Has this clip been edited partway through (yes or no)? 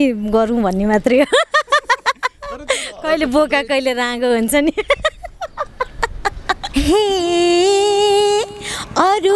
yes